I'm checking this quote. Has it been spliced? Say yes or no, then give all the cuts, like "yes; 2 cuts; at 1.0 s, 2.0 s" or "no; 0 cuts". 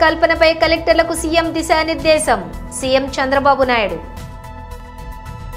yes; 1 cut; at 4.6 s